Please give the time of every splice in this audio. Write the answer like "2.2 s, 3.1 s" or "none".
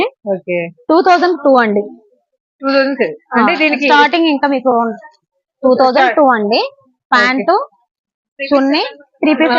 none